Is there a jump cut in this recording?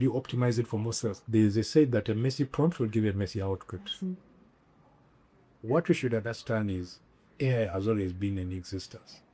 yes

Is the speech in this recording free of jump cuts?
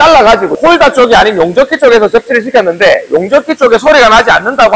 yes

